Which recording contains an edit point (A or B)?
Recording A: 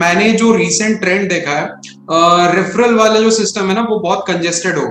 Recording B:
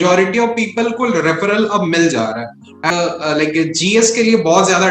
B